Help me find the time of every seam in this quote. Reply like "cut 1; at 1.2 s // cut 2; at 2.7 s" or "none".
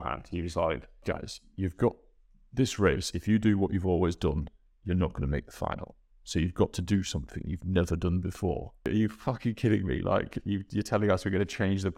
cut 1; at 1.0 s // cut 2; at 8.9 s